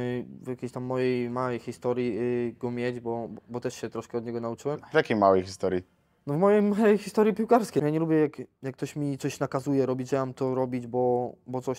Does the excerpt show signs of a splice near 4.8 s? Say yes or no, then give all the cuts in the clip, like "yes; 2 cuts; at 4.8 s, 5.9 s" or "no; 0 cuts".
yes; 2 cuts; at 4.8 s, 7.8 s